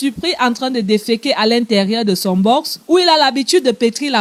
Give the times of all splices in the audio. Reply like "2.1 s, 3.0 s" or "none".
none